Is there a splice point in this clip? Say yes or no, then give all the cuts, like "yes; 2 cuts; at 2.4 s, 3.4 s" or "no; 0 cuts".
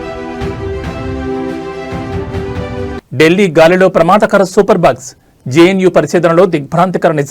no; 0 cuts